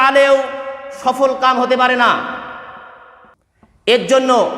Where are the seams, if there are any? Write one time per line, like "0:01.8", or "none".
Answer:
none

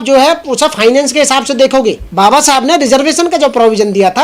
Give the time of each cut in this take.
0:02.0

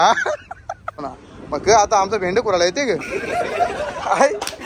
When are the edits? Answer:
0:01.1

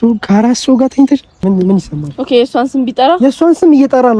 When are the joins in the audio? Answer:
0:01.4

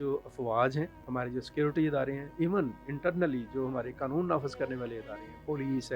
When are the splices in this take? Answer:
0:01.0

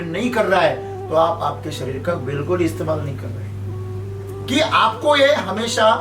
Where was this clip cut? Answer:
0:04.2

